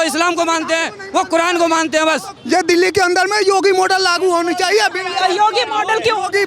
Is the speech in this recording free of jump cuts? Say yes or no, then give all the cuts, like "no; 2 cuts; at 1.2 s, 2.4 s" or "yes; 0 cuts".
no; 1 cut; at 2.3 s